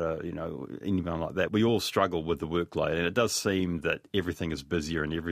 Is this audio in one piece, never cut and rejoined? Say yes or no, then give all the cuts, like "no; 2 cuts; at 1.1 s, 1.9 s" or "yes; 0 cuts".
no; 1 cut; at 1.5 s